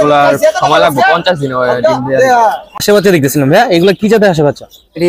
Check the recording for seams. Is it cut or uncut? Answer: cut